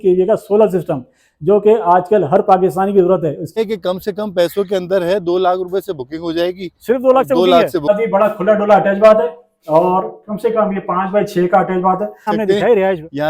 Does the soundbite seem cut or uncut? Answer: cut